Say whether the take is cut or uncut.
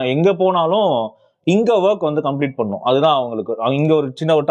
uncut